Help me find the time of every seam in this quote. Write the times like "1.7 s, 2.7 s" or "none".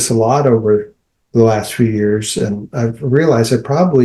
none